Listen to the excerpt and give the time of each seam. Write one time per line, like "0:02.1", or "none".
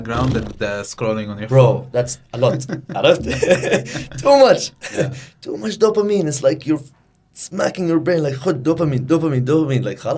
none